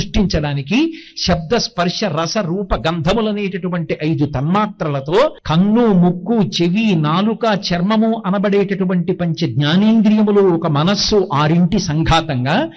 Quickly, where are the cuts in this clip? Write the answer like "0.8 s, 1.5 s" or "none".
5.4 s

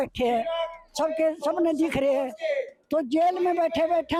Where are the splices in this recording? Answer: none

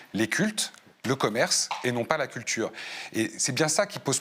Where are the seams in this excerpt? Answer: none

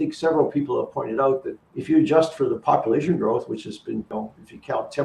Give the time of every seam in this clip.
1.5 s

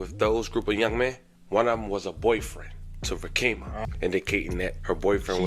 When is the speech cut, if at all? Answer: 3.8 s

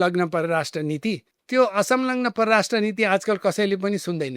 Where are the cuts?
1.3 s

